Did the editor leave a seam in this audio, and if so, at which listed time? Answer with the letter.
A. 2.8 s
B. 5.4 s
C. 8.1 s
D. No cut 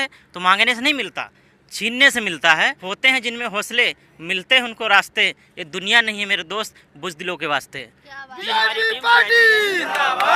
A